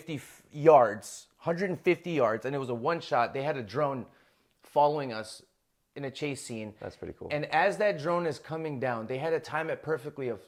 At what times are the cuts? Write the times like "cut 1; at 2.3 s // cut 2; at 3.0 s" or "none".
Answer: none